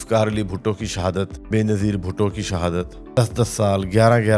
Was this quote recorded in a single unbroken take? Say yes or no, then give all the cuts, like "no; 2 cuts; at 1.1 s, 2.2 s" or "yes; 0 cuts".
no; 2 cuts; at 1.4 s, 3.0 s